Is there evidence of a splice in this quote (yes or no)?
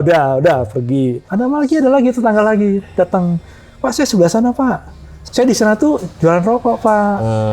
yes